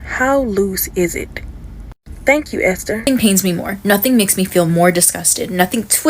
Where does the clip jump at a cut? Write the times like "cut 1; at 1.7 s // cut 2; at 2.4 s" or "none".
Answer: cut 1; at 3.0 s